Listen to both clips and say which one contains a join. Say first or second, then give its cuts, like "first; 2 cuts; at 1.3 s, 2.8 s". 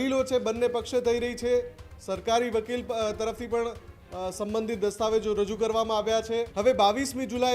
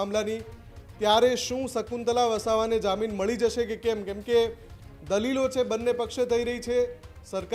first; 1 cut; at 6.5 s